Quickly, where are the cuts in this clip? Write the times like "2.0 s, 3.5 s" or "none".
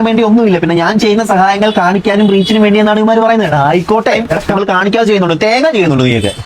4.4 s